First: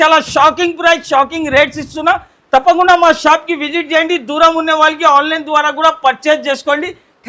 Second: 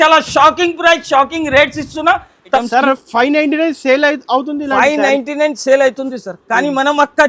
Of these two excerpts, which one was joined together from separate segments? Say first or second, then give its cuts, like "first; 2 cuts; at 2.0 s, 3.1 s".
second; 1 cut; at 2.6 s